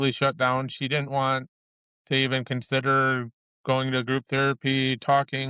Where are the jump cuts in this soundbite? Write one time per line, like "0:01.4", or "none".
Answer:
none

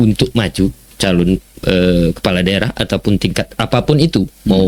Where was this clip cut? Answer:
none

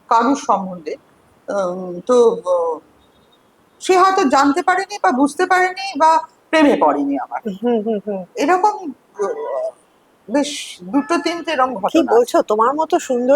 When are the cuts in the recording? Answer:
none

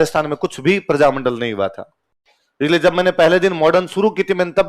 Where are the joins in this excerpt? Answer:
none

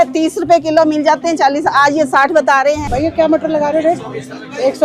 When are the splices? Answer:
0:02.8

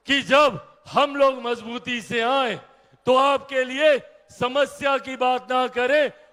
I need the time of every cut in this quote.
none

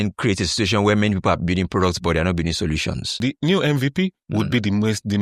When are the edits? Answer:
0:03.2

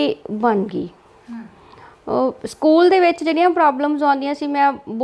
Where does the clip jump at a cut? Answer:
none

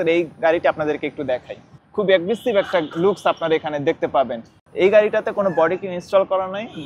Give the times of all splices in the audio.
0:01.8
0:04.5

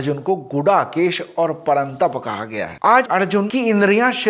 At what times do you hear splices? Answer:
0:02.8

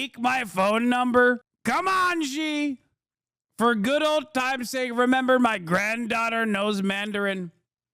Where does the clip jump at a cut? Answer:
0:01.5

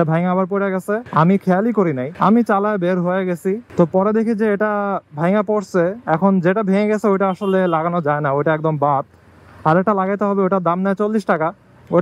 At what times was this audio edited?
0:01.0
0:02.1
0:03.7

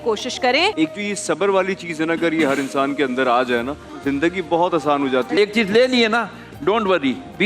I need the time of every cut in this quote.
0:00.7
0:03.8
0:05.4

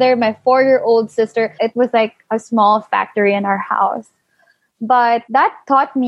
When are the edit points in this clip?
0:01.5
0:05.2

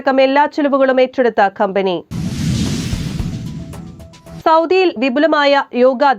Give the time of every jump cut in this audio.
0:02.1
0:04.2

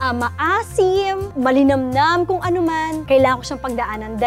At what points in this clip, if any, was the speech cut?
0:01.3
0:03.0

